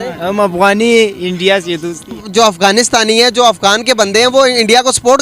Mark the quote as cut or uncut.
cut